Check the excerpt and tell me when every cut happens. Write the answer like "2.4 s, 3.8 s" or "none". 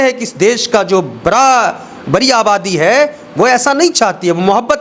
none